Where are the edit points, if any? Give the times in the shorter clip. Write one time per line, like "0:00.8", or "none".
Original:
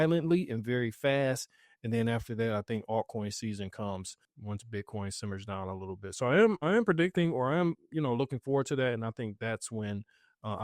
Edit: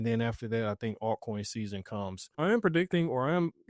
0:02.4